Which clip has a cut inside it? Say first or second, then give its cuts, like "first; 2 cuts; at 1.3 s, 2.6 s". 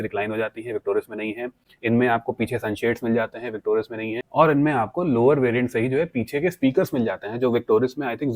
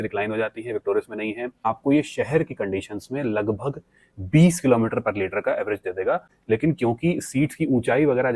second; 2 cuts; at 1.6 s, 6.3 s